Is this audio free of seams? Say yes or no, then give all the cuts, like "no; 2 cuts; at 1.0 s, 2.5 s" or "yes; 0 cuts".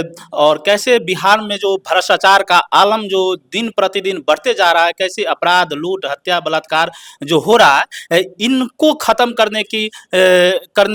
yes; 0 cuts